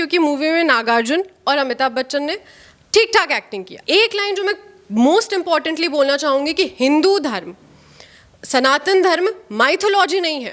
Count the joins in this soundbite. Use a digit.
1